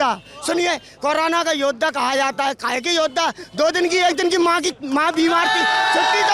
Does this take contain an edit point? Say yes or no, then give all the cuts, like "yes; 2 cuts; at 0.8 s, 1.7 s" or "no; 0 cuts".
no; 0 cuts